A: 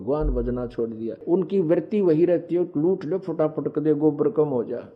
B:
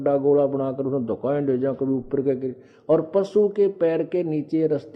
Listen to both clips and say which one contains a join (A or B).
A